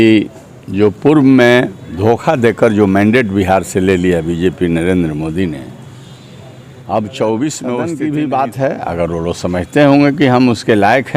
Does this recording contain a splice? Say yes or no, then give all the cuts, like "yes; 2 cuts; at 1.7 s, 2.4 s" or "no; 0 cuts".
yes; 1 cut; at 7.9 s